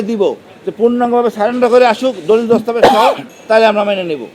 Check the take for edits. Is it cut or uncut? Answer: cut